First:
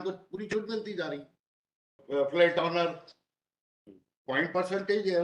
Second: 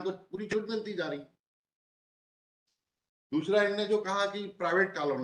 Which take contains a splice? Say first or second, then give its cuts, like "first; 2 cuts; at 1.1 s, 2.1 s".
first; 1 cut; at 2.0 s